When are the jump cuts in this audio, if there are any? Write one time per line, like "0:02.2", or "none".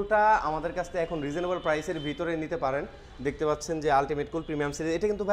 none